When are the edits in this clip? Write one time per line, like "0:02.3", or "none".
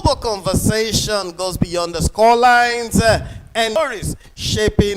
0:03.7